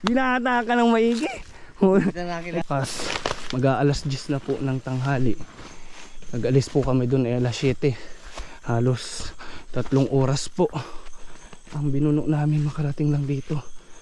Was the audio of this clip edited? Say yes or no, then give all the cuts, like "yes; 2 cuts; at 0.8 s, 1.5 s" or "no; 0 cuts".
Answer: yes; 1 cut; at 2.6 s